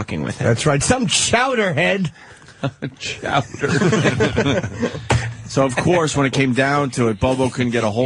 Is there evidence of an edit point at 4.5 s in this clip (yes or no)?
no